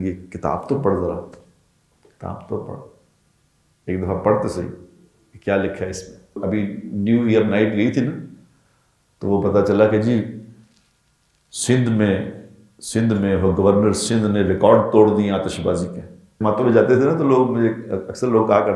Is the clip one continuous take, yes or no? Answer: no